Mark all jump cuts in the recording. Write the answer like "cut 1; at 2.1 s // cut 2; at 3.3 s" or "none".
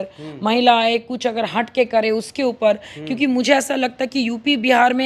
none

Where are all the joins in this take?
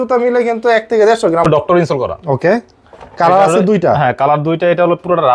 cut 1; at 1.4 s

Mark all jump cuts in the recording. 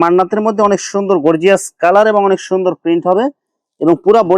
none

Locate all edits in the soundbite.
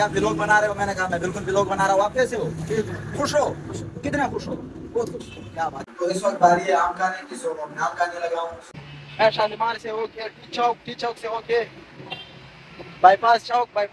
cut 1; at 5.8 s // cut 2; at 8.6 s

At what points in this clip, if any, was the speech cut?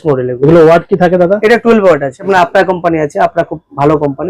cut 1; at 2.2 s

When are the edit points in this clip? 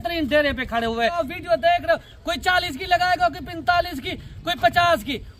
cut 1; at 1.2 s

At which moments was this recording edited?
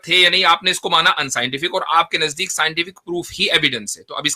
none

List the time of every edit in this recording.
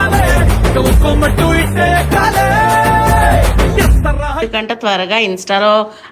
cut 1; at 4.4 s

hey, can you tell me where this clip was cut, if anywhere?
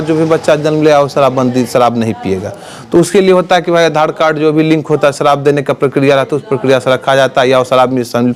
none

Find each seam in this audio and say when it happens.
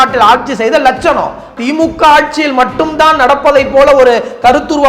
cut 1; at 1.5 s

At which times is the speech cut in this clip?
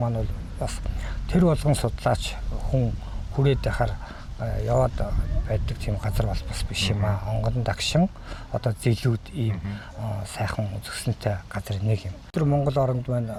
none

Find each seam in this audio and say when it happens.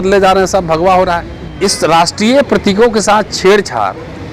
cut 1; at 1.4 s

